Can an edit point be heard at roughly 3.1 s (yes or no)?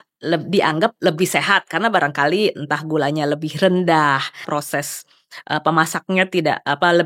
no